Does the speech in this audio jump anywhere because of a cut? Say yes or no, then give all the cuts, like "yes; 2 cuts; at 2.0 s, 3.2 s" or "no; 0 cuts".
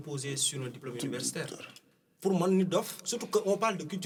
no; 0 cuts